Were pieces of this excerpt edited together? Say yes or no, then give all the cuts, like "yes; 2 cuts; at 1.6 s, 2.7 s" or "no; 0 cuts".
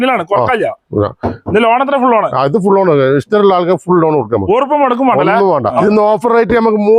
yes; 1 cut; at 5.8 s